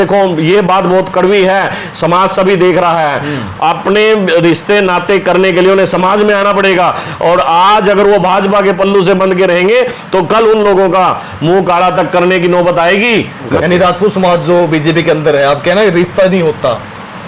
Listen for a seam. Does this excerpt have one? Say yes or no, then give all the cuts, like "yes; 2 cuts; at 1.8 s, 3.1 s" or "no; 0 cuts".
yes; 1 cut; at 13.5 s